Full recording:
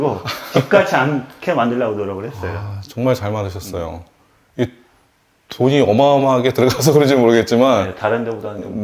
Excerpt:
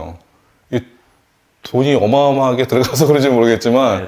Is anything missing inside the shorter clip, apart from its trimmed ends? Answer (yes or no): no